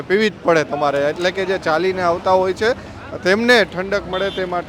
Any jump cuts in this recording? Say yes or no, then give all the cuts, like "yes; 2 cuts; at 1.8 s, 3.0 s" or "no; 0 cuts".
no; 0 cuts